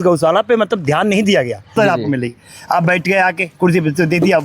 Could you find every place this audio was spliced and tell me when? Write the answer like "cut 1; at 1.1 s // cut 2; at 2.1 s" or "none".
cut 1; at 1.8 s